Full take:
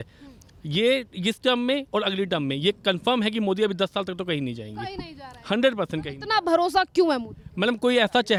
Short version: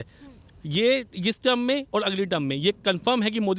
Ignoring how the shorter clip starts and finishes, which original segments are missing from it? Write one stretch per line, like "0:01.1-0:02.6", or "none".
none